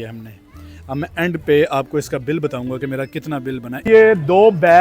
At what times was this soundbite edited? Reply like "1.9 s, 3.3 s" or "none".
3.7 s